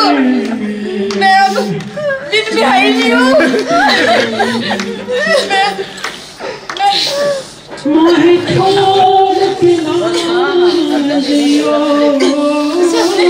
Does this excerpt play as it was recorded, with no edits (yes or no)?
yes